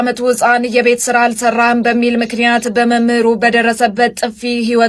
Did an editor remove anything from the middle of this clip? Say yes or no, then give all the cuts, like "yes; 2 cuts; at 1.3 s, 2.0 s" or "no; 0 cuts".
no; 0 cuts